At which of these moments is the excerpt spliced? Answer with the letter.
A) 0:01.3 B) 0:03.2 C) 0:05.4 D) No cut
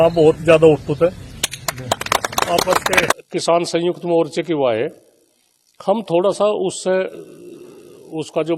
B